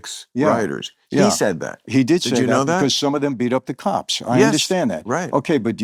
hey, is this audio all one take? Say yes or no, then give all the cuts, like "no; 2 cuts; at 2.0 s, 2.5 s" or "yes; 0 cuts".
yes; 0 cuts